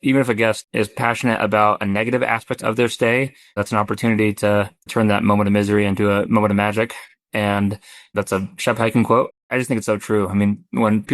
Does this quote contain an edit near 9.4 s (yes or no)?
yes